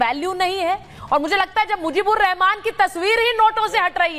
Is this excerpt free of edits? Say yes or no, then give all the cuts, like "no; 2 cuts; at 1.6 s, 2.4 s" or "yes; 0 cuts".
no; 1 cut; at 0.9 s